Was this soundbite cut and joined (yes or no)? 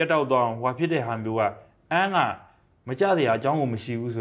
no